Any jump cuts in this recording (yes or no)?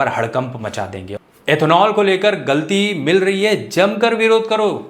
yes